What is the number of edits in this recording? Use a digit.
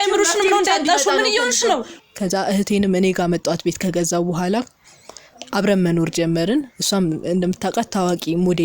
1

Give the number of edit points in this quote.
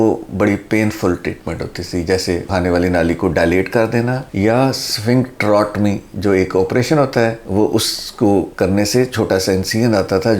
0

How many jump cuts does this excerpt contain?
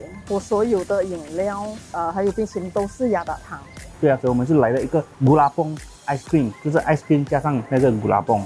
1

